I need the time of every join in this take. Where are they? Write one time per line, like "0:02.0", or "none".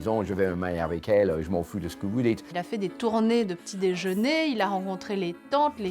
0:02.4